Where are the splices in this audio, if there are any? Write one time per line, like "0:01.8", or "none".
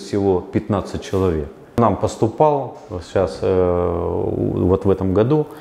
0:01.8